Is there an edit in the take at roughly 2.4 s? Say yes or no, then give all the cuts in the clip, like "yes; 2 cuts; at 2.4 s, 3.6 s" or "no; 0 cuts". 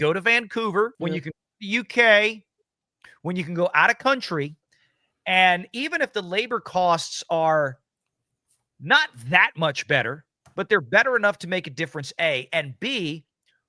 no; 1 cut; at 1.0 s